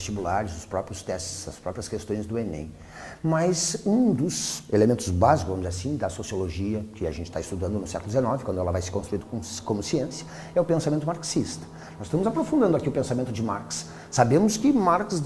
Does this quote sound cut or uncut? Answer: uncut